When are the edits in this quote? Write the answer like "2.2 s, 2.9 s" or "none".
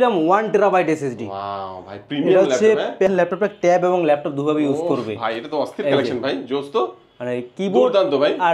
3.1 s